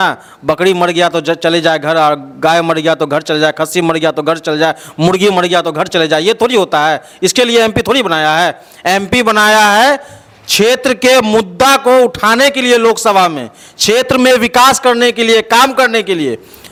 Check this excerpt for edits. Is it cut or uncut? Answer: uncut